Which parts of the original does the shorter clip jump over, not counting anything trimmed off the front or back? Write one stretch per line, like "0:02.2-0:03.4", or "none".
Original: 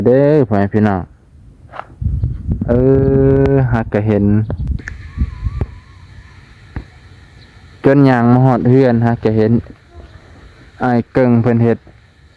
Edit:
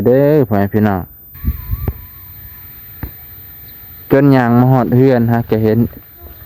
0:01.2-0:05.0

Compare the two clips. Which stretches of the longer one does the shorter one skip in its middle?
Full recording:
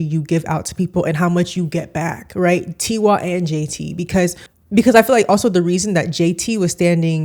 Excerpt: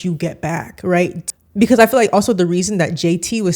0:02.8-0:04.4

